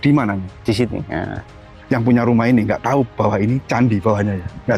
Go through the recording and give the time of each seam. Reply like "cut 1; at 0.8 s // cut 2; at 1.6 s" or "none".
cut 1; at 1.7 s